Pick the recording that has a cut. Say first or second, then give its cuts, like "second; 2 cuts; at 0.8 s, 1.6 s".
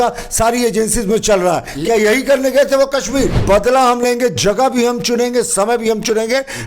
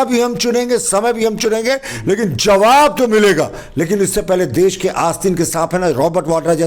first; 1 cut; at 3.4 s